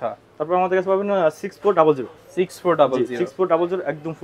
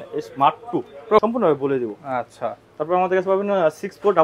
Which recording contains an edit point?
second; 1 cut; at 1.2 s

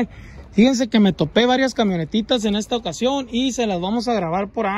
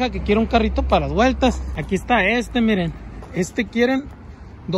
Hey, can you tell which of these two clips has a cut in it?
second; 2 cuts; at 1.7 s, 3.2 s

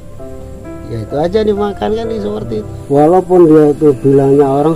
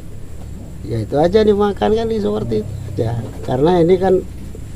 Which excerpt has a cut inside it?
first; 1 cut; at 2.7 s

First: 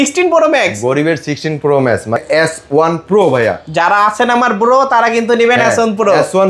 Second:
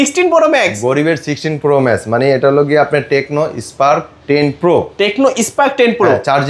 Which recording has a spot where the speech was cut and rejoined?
first; 1 cut; at 2.2 s

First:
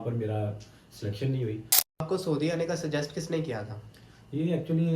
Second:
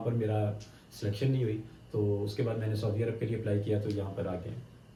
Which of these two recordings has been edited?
first; 1 cut; at 2.0 s

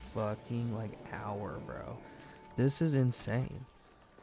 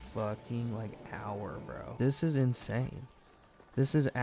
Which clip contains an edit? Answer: second; 1 cut; at 1.9 s

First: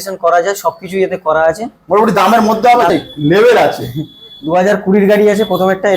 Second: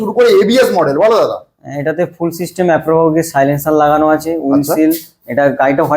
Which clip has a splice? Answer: first; 1 cut; at 2.9 s

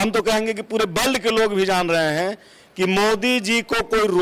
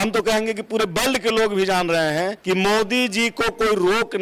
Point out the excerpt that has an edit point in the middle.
second; 1 cut; at 2.4 s

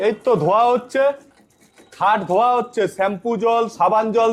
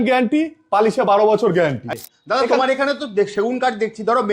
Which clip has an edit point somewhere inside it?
second; 1 cut; at 1.8 s

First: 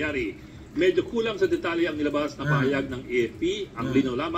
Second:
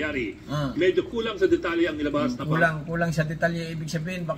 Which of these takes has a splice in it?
first; 1 cut; at 2.3 s

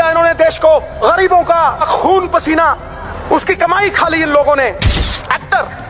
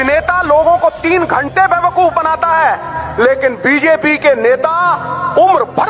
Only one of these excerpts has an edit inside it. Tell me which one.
first; 4 cuts; at 0.9 s, 1.8 s, 3.1 s, 5.0 s

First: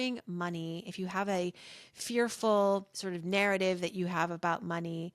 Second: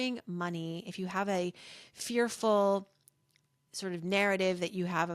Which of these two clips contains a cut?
first; 1 cut; at 2.9 s

